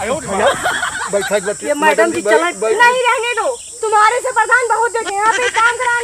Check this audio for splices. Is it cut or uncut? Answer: cut